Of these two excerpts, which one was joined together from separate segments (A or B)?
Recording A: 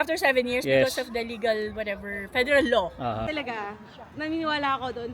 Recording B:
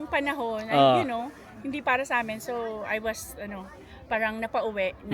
A